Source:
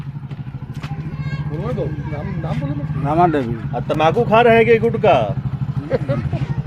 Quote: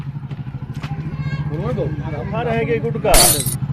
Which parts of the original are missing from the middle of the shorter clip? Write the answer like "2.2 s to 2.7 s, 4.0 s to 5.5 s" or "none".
2.4 s to 4.3 s